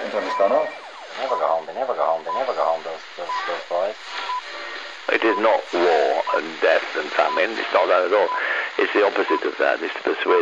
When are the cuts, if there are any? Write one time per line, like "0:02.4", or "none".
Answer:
0:04.6